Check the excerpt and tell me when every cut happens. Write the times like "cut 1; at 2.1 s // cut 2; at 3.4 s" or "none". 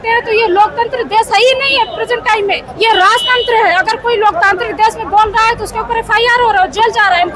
cut 1; at 2.7 s